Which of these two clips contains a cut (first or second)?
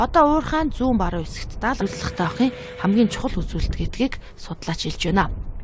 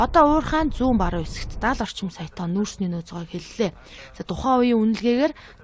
second